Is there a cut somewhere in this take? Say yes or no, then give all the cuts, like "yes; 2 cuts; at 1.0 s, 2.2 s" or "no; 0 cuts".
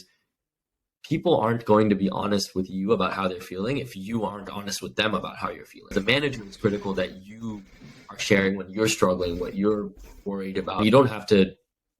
yes; 2 cuts; at 5.9 s, 10.8 s